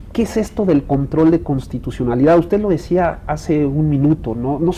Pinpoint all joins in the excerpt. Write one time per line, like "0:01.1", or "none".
none